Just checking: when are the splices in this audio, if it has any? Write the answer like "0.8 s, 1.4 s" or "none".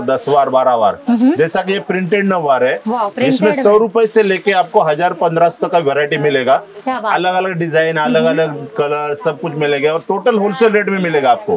none